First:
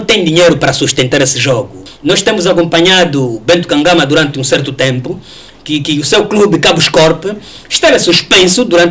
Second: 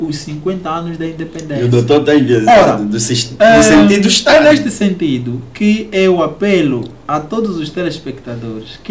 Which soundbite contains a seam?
first; 1 cut; at 1.8 s

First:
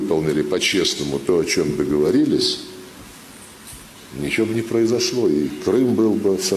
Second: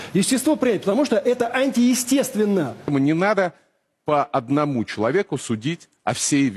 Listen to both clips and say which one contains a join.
second; 1 cut; at 3.2 s

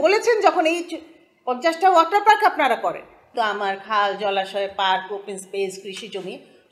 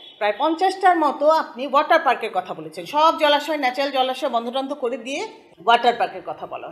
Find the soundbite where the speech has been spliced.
first; 1 cut; at 3.2 s

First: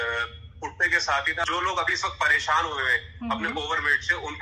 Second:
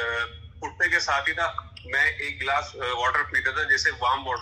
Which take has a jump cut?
first; 1 cut; at 1.4 s

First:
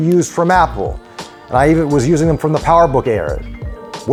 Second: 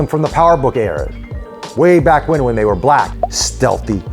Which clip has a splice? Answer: second; 1 cut; at 3.1 s

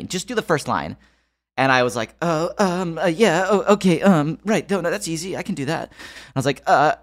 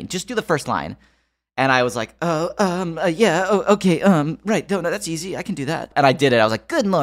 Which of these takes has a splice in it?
second; 1 cut; at 5.9 s

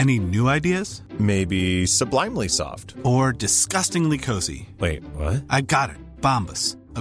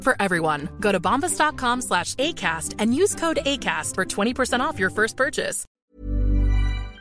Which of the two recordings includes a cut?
second; 1 cut; at 5.9 s

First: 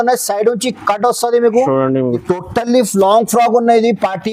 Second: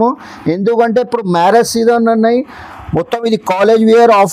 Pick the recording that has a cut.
first; 1 cut; at 2.2 s

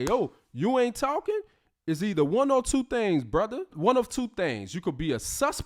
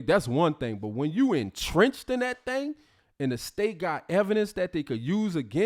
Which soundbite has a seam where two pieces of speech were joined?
first; 1 cut; at 3.7 s

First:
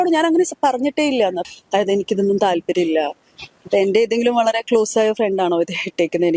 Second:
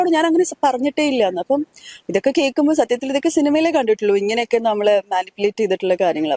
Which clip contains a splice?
first; 1 cut; at 1.4 s

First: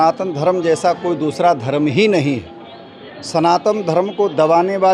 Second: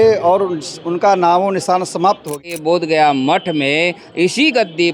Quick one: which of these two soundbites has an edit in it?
second; 1 cut; at 2.3 s

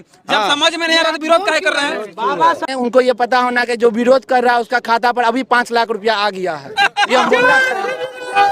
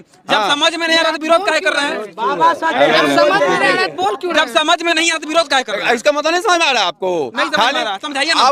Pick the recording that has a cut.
first; 1 cut; at 2.7 s

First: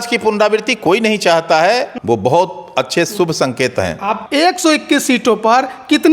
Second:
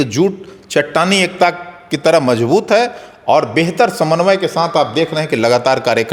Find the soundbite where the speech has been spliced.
first; 2 cuts; at 1.9 s, 4.2 s

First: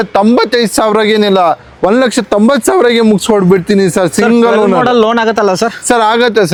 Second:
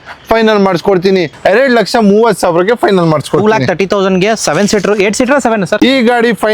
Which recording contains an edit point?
second; 2 cuts; at 1.3 s, 5.7 s

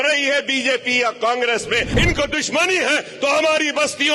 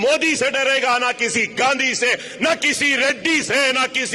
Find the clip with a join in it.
first; 1 cut; at 1.9 s

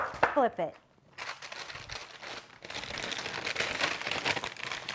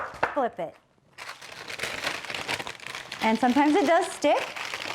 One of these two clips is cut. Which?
second; 1 cut; at 1.6 s

